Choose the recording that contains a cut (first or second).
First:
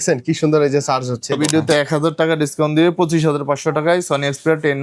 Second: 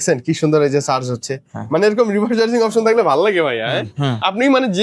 first